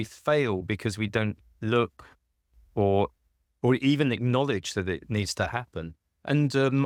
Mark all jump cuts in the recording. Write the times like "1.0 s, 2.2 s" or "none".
none